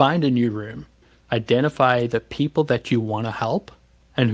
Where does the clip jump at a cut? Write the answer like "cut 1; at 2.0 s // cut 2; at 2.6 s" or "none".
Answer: cut 1; at 1.1 s